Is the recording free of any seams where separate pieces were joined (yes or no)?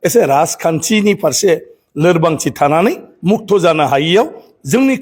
yes